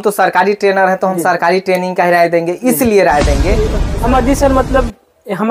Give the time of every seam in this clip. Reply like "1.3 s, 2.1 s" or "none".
3.8 s